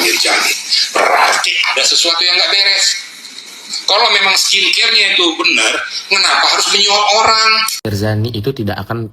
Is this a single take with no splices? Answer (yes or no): no